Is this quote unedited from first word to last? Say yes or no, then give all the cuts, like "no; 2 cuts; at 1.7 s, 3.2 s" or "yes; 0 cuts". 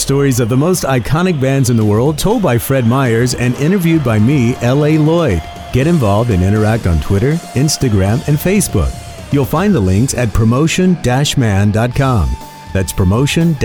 yes; 0 cuts